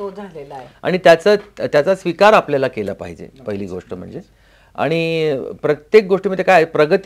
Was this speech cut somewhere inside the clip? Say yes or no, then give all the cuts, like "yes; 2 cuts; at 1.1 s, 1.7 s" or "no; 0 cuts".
no; 0 cuts